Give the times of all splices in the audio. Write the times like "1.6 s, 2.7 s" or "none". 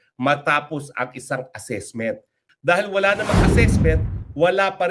2.4 s